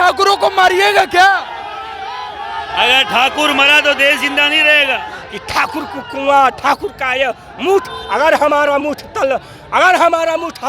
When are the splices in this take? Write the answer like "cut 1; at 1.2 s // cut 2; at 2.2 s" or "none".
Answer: cut 1; at 5.2 s